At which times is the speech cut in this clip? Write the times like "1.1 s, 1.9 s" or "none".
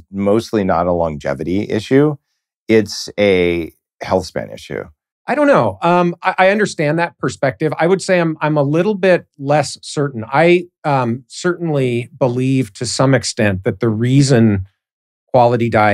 none